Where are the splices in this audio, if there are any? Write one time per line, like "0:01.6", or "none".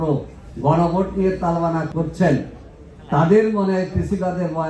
0:01.9